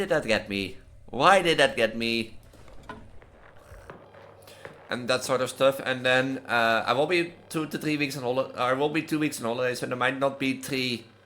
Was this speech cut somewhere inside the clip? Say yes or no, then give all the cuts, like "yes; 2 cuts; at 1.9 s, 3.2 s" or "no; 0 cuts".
yes; 1 cut; at 3.4 s